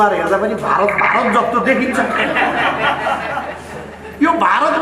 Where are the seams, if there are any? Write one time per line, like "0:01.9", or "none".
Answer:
none